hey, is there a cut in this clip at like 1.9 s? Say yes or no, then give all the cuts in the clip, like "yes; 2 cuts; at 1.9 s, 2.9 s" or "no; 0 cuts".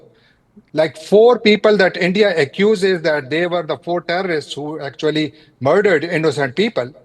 no; 0 cuts